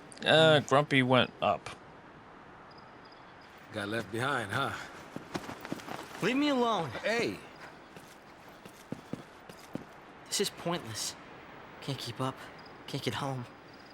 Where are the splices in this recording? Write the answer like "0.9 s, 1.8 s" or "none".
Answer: 3.4 s